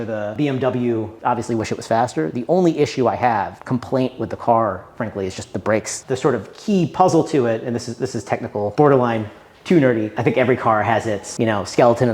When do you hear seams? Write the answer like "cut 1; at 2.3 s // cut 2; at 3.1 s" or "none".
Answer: cut 1; at 1.2 s // cut 2; at 6.0 s // cut 3; at 10.1 s